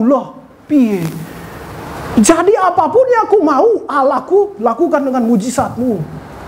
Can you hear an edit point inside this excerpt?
no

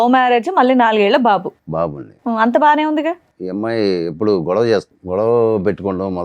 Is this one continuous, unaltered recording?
no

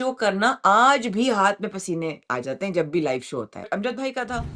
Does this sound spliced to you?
yes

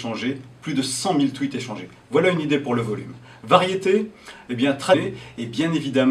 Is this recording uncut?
yes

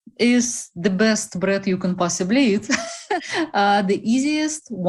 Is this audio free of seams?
no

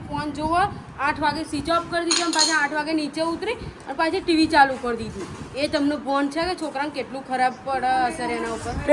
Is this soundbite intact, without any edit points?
yes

